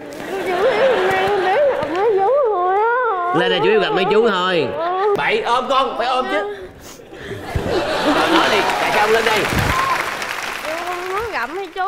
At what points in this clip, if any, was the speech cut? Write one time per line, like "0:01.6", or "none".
0:05.2